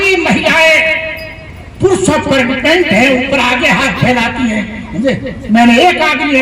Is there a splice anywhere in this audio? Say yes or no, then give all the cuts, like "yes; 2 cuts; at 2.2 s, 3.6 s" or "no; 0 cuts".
no; 0 cuts